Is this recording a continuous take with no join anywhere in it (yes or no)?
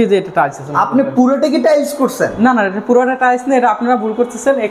yes